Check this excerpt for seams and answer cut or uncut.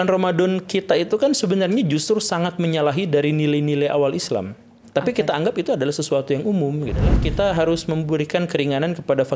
cut